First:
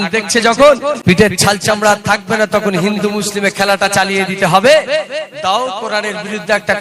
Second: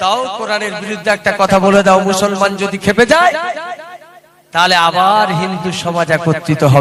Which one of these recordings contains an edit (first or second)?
first